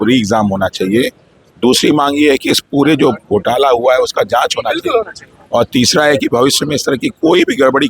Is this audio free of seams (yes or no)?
yes